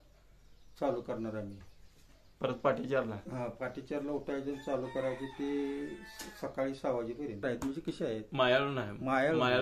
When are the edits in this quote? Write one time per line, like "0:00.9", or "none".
0:07.4